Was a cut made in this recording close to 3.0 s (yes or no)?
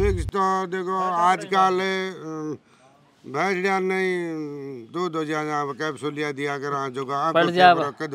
no